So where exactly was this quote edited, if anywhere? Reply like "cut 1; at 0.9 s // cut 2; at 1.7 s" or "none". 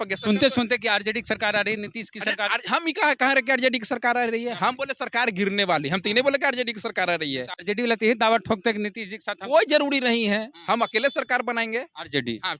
none

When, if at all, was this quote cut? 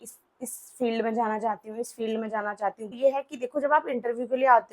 cut 1; at 3.0 s

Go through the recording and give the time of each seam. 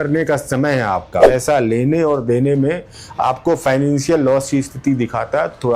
cut 1; at 1.2 s

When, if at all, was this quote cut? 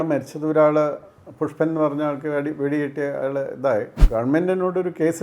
cut 1; at 4.0 s

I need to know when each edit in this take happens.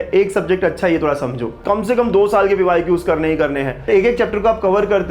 cut 1; at 1.5 s // cut 2; at 3.9 s

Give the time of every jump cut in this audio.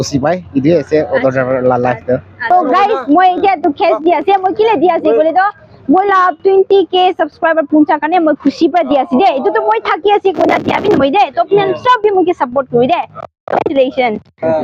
cut 1; at 2.5 s

